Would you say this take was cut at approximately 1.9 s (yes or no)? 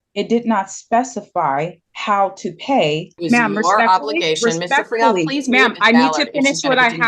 yes